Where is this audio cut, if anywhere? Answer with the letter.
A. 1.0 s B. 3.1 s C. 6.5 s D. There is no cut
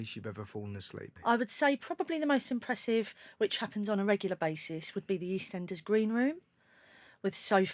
A